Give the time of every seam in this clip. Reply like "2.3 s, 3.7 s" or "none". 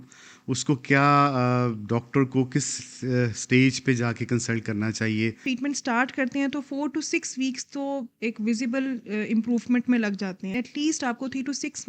5.4 s, 10.5 s

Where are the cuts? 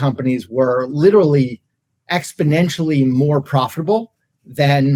none

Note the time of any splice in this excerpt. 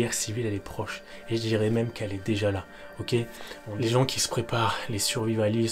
3.6 s

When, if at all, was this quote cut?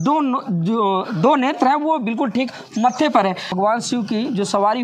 3.5 s

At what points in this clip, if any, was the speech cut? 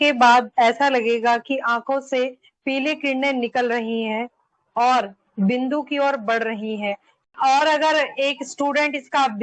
7.1 s

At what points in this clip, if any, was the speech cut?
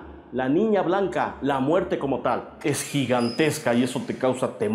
2.6 s

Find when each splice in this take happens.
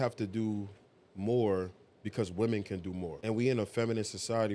3.1 s

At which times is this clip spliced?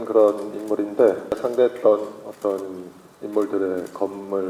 1.4 s

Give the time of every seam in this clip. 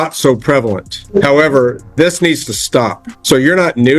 0.9 s, 3.1 s

